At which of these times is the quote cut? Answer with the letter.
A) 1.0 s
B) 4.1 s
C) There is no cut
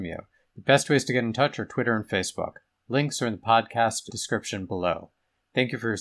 B